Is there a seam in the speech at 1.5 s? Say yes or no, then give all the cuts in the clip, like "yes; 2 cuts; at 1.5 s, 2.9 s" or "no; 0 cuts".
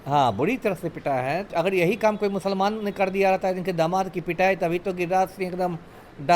yes; 1 cut; at 1.5 s